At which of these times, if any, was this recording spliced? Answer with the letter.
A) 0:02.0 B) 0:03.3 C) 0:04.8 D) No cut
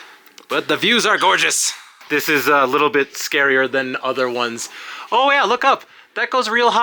A